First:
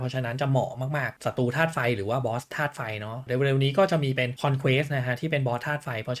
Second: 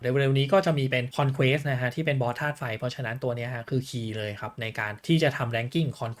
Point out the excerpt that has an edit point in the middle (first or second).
first